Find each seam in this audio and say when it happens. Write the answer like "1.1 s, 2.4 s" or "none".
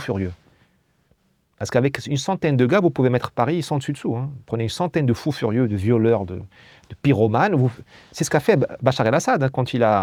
none